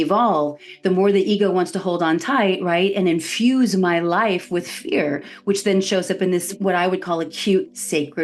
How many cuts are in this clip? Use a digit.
1